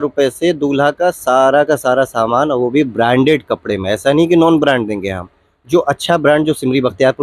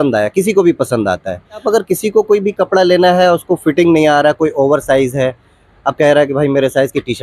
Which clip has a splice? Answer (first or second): second